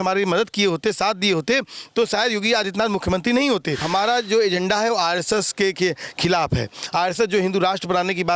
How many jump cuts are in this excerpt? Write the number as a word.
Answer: one